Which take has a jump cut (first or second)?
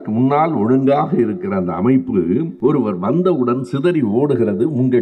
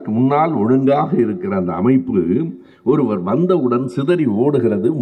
first